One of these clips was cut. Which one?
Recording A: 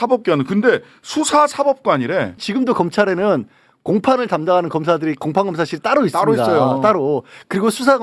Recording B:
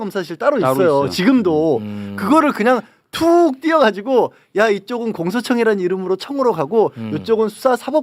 A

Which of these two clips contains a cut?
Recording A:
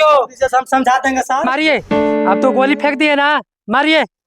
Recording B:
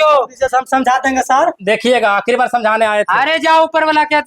A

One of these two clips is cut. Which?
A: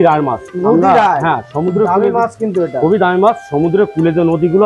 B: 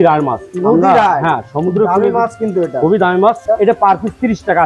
B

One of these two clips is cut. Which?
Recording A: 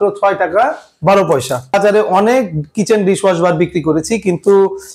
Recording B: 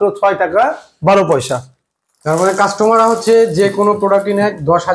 A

